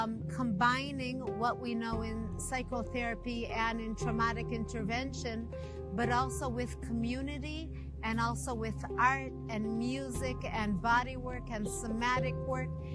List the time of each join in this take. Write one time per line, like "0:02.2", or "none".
none